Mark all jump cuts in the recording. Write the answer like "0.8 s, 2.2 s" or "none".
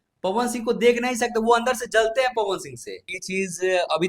3.1 s